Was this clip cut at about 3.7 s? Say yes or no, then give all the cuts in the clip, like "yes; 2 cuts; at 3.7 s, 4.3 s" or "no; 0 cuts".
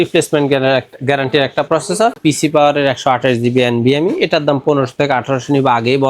no; 1 cut; at 2.2 s